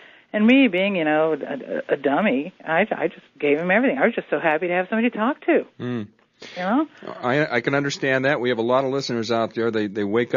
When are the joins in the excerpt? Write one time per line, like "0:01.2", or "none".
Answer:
none